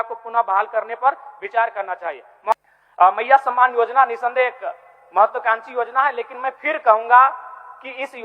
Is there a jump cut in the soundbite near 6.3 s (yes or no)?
no